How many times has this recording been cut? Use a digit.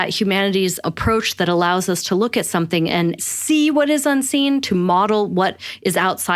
2